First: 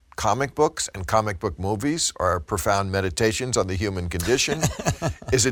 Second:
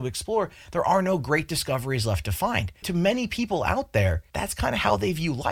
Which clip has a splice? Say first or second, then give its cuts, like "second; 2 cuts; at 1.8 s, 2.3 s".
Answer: second; 2 cuts; at 2.9 s, 4.3 s